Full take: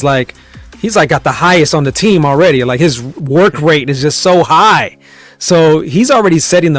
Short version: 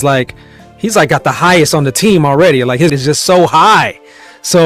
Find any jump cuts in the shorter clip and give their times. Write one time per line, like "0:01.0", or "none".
0:03.0